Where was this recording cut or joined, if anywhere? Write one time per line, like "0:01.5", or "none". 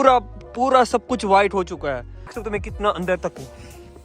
0:02.4